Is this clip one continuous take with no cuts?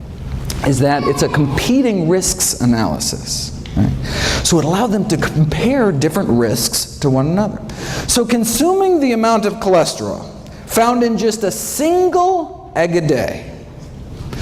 no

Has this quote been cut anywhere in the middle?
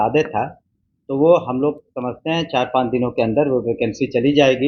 no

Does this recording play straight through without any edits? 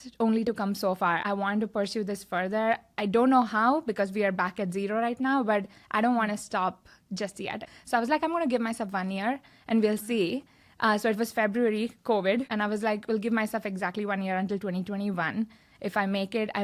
no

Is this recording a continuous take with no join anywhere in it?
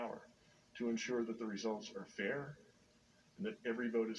yes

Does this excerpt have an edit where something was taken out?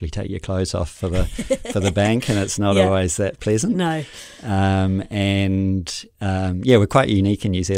no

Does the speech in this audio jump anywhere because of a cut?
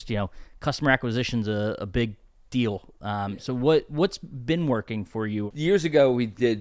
yes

